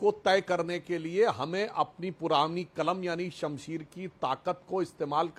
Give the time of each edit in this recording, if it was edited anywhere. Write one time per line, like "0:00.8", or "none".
none